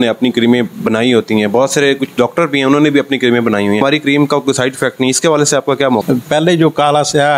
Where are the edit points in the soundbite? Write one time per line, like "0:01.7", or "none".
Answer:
0:03.8
0:06.0